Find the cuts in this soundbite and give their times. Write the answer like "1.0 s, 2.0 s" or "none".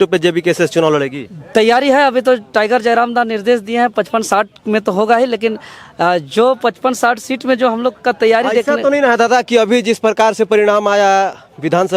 none